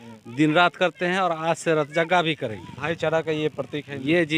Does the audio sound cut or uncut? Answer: uncut